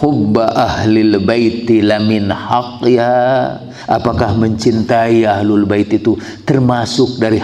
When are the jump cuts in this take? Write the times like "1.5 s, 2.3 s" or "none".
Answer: 3.7 s